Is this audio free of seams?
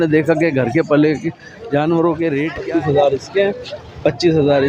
no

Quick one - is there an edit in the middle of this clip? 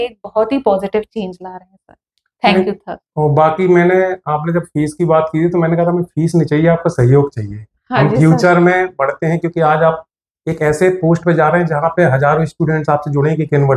no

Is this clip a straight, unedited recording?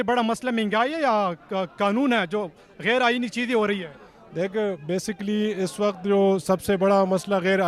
yes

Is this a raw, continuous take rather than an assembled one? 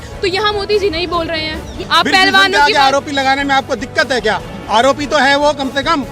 no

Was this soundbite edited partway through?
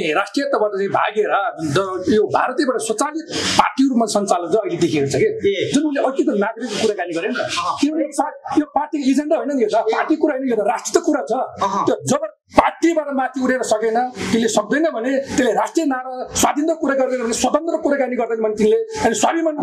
no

